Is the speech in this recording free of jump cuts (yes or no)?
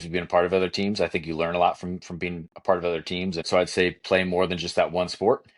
no